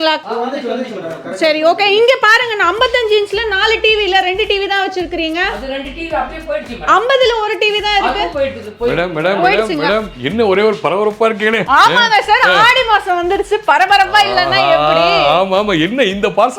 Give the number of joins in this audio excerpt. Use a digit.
0